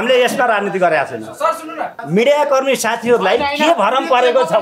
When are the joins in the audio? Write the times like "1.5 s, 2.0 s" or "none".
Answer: 2.0 s